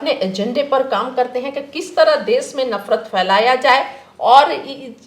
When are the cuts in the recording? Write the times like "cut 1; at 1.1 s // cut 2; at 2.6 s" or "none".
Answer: none

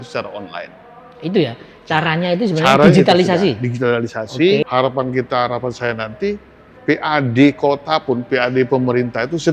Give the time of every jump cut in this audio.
cut 1; at 4.6 s

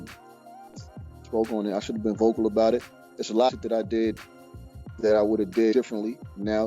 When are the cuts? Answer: cut 1; at 3.5 s

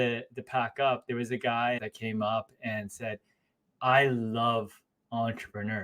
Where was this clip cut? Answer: cut 1; at 1.8 s

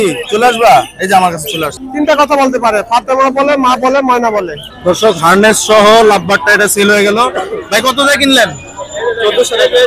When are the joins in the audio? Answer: cut 1; at 1.8 s // cut 2; at 4.6 s

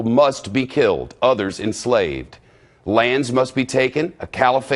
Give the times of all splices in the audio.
cut 1; at 3.7 s

